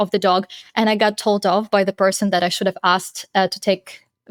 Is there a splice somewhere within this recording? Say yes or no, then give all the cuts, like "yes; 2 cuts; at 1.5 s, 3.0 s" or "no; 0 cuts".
no; 0 cuts